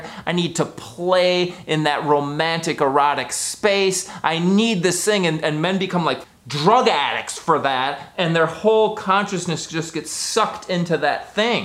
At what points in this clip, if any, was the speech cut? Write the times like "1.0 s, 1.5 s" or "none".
6.2 s